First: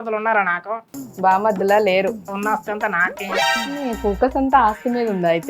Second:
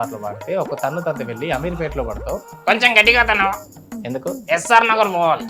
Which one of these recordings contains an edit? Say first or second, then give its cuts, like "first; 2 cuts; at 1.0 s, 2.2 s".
first; 2 cuts; at 2.3 s, 3.5 s